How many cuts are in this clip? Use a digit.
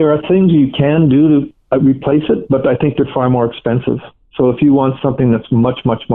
0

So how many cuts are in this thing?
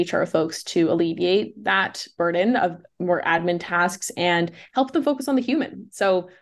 1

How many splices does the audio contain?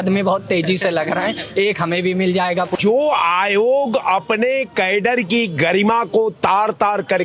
1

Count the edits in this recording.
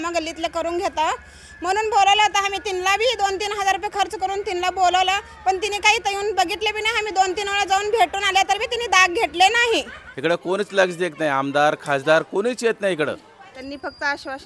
2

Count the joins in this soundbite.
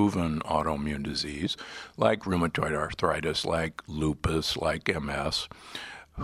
1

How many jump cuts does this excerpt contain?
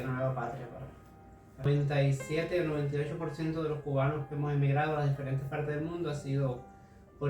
1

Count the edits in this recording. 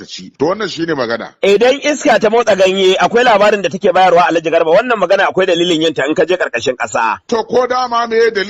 1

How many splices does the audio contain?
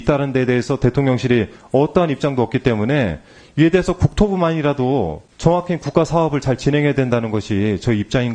1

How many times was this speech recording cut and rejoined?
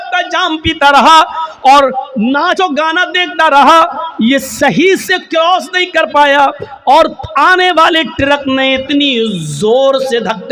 0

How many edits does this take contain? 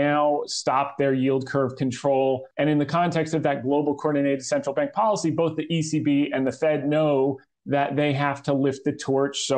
1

